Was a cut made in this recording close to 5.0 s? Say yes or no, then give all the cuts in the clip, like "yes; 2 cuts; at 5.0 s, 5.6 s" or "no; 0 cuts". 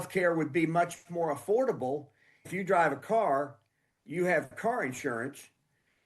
no; 1 cut; at 2.5 s